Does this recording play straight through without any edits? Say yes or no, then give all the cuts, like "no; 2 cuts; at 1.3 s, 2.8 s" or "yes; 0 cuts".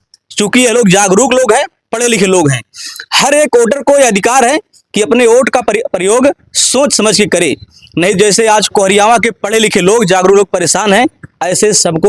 yes; 0 cuts